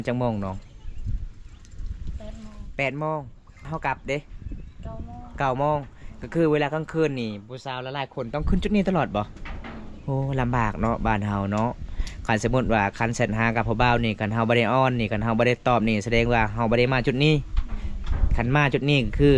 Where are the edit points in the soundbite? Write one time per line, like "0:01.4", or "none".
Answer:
0:03.7

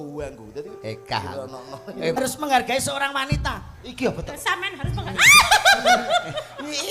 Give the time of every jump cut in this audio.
0:02.2

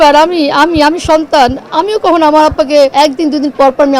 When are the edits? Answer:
0:02.9

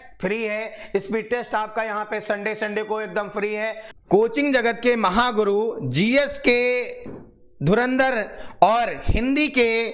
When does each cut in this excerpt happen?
none

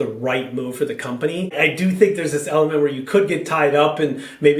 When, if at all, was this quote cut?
0:01.5

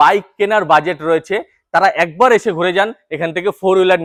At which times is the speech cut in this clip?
none

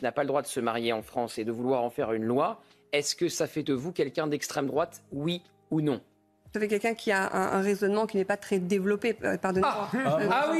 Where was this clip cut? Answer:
0:06.5

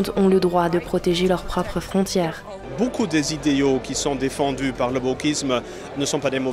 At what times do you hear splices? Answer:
0:02.6

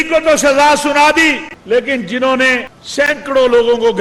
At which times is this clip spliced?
0:01.5
0:02.8

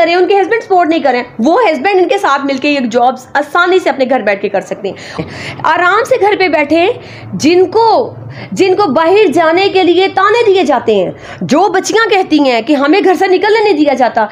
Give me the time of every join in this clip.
0:05.2

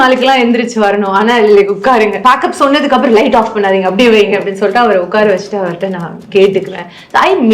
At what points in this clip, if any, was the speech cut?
0:02.2

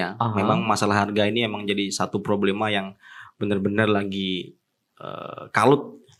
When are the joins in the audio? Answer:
none

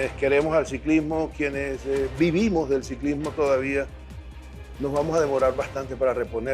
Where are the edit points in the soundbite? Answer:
none

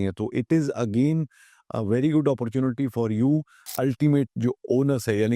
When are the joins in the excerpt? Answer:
0:03.6

